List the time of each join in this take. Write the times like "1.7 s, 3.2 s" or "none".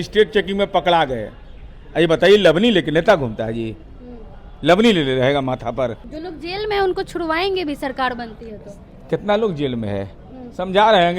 6.0 s